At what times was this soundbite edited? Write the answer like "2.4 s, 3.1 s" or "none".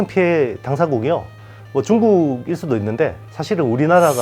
3.3 s